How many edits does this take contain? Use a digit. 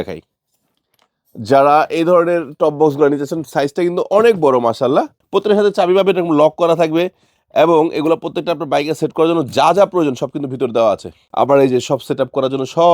2